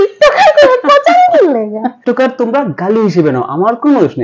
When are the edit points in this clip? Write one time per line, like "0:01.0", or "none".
0:01.9